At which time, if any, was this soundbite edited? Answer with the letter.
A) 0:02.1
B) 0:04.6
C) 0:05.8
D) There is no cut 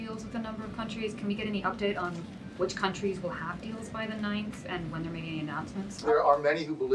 C